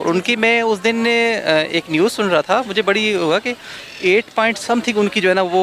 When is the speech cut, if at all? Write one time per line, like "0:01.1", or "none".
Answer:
none